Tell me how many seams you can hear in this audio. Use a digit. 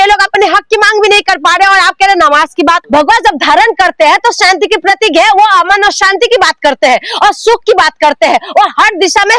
1